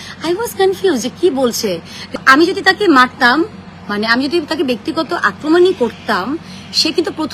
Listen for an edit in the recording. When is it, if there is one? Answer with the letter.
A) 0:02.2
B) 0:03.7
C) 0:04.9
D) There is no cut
A